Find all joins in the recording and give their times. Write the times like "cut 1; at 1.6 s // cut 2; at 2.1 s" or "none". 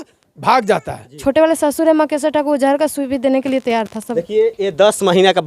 cut 1; at 1.0 s // cut 2; at 4.0 s